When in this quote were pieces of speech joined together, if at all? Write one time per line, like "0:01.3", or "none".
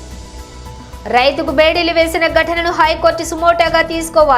none